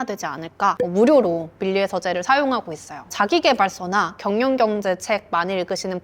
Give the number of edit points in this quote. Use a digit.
2